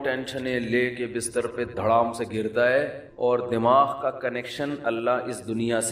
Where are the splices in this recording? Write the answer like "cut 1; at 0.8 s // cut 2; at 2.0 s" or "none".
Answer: none